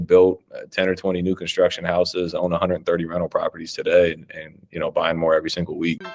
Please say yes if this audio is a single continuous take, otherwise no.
yes